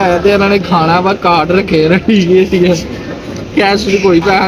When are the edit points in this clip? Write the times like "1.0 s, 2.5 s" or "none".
none